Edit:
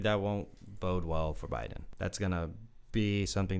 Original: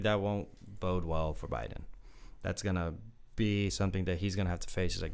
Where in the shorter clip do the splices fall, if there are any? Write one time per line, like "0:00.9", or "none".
0:01.8

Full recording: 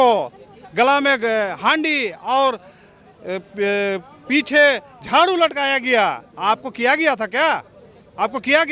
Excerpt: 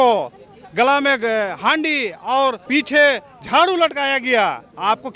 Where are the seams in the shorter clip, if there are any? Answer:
0:02.6

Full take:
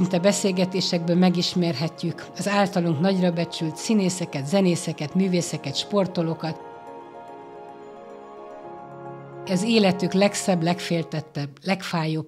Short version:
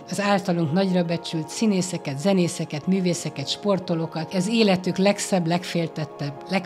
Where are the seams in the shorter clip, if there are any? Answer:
0:04.3

